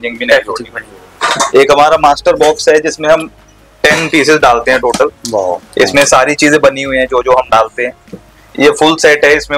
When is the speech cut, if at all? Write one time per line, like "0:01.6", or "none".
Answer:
0:01.2